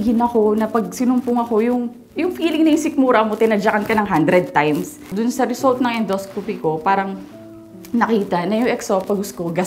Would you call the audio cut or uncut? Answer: cut